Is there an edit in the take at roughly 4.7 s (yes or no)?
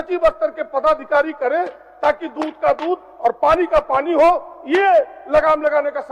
no